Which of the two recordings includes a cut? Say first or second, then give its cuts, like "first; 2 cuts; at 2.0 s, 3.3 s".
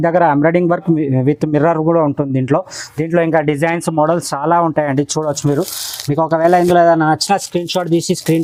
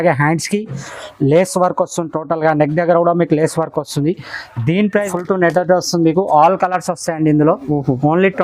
second; 1 cut; at 5.0 s